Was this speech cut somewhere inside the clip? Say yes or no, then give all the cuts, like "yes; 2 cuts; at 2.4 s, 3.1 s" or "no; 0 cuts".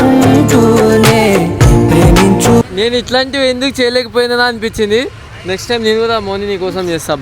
yes; 1 cut; at 2.7 s